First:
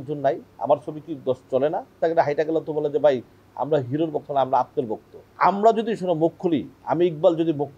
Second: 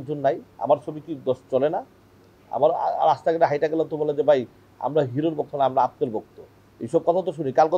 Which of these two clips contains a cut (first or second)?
first